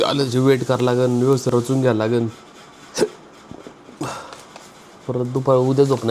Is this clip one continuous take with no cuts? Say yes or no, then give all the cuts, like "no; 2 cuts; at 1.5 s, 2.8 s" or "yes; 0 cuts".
yes; 0 cuts